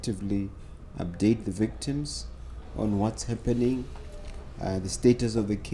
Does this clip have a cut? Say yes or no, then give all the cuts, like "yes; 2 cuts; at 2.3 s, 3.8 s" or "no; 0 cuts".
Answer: no; 0 cuts